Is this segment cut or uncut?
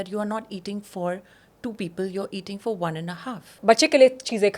cut